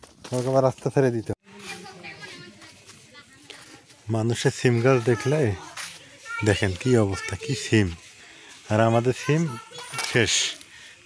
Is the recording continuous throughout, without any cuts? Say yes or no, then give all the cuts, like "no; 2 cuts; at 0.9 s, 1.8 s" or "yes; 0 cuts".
no; 1 cut; at 1.3 s